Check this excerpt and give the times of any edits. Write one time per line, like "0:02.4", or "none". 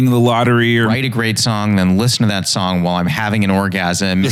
0:00.9